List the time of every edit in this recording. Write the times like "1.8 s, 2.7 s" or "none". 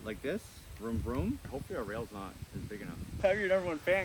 1.4 s